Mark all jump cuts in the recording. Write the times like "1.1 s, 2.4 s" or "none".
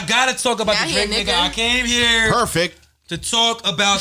none

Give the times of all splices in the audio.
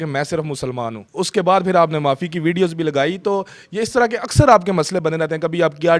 1.0 s

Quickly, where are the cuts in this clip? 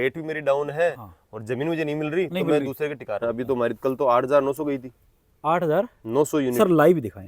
3.2 s

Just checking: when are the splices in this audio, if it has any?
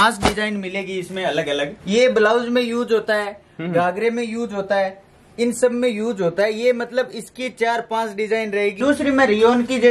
1.7 s, 8.8 s

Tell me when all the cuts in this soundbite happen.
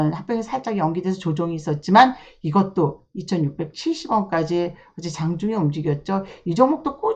none

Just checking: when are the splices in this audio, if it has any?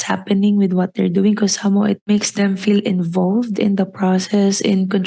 2.1 s

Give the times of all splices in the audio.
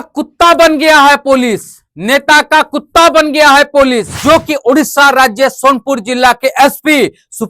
4.1 s

